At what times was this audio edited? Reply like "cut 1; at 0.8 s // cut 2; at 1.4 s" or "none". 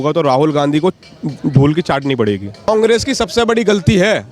cut 1; at 2.7 s